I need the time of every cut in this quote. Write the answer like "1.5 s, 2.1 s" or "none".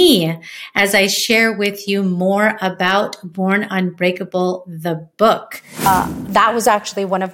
5.9 s